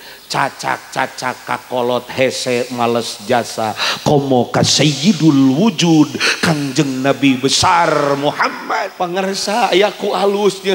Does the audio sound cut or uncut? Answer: cut